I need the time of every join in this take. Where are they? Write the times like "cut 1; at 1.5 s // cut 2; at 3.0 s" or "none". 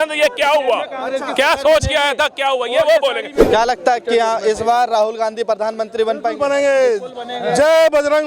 cut 1; at 3.4 s